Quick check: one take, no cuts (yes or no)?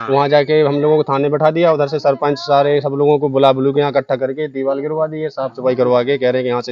yes